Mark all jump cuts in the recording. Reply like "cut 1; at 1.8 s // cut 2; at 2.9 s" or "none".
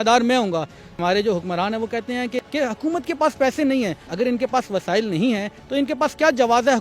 cut 1; at 1.0 s // cut 2; at 2.4 s // cut 3; at 4.0 s